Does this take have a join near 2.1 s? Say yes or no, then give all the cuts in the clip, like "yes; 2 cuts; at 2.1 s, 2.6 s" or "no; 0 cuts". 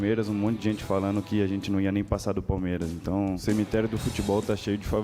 no; 1 cut; at 3.4 s